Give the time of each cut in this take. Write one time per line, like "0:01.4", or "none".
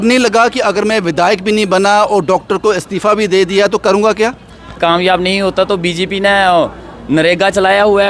0:04.8